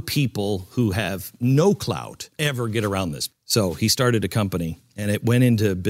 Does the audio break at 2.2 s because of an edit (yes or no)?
no